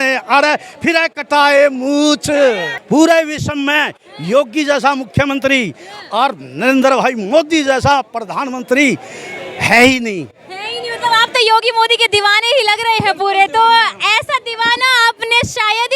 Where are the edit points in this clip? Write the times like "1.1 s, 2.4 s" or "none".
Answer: 2.7 s

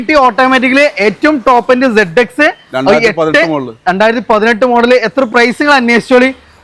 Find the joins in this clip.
5.3 s

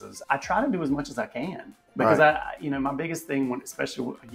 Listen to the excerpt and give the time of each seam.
none

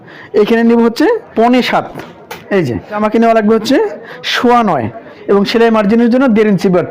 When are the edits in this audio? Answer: 1.3 s, 3.0 s, 5.1 s

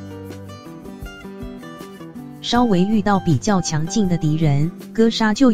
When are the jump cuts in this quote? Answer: 2.2 s

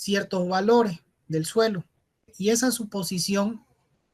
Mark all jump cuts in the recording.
2.3 s

